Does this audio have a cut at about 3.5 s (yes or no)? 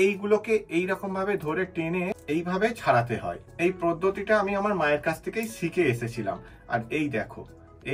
yes